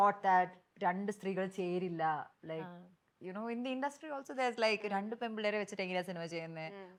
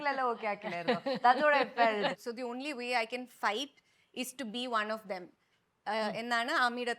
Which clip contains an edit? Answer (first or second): second